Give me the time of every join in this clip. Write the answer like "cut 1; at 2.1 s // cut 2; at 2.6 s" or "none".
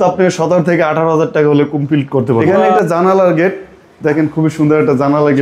cut 1; at 2.6 s